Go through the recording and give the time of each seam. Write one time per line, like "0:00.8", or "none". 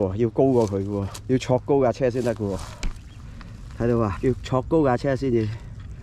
0:01.1
0:04.2